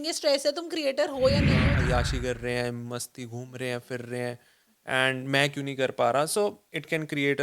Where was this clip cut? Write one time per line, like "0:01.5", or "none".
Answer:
0:01.6